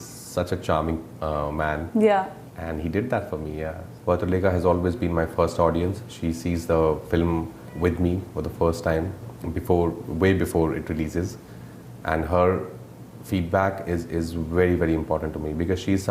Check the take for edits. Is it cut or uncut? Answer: cut